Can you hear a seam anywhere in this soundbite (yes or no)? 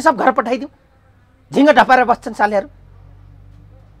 no